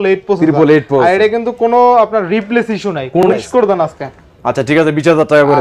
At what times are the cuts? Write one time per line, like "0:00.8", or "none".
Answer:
0:03.2